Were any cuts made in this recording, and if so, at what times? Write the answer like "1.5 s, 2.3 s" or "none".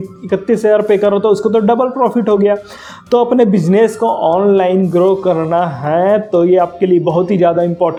none